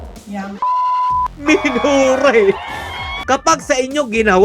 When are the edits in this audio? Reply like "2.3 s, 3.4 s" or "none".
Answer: 1.4 s, 3.1 s